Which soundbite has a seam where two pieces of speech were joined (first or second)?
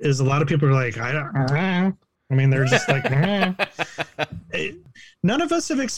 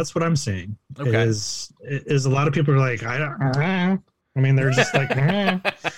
first